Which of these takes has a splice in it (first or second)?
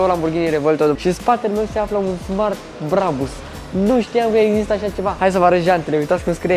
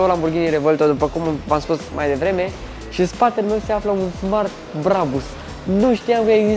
first